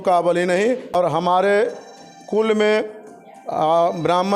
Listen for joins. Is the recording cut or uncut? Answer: cut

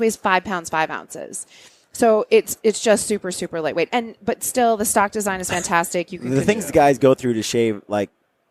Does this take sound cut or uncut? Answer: uncut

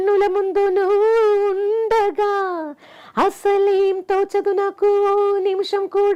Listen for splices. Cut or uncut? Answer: uncut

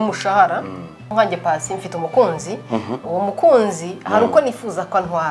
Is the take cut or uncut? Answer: cut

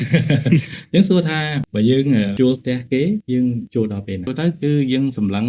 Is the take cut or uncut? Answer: cut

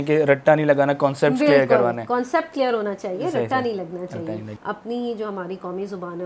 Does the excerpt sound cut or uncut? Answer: cut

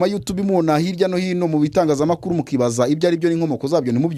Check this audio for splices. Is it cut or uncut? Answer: uncut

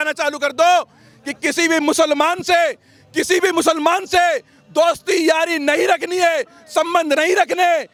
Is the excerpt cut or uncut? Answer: uncut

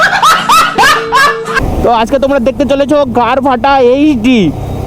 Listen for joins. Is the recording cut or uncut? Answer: cut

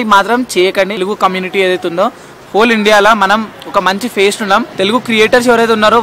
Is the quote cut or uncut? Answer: uncut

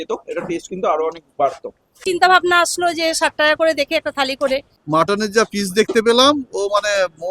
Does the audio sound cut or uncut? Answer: cut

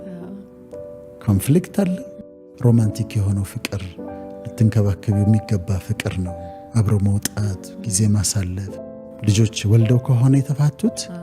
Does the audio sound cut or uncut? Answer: cut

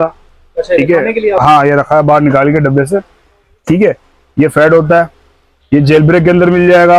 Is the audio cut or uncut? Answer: uncut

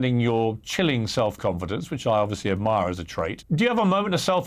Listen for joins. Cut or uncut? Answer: cut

